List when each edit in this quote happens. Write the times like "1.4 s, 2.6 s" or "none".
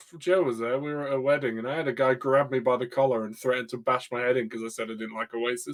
none